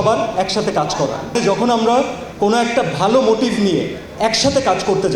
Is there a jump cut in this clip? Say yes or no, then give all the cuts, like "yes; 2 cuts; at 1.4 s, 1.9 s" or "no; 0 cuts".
yes; 1 cut; at 1.4 s